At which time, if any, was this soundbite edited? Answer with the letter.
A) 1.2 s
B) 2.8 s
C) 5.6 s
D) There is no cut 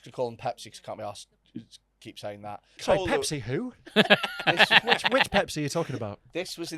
B